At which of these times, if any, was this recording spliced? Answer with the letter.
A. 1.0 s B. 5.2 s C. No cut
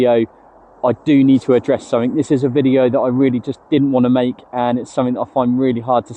C